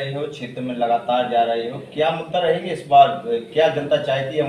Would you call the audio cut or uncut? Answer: uncut